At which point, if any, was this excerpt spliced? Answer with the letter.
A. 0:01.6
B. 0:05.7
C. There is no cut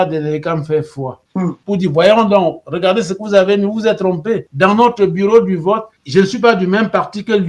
A